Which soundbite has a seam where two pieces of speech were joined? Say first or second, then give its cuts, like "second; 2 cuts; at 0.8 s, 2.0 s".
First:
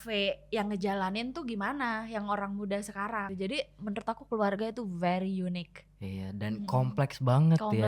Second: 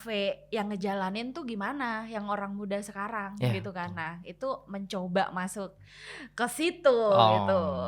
first; 1 cut; at 3.3 s